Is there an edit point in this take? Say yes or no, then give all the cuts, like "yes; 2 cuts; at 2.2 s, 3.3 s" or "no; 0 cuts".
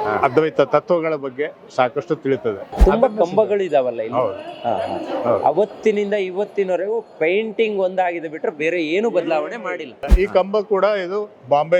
yes; 2 cuts; at 2.8 s, 10.0 s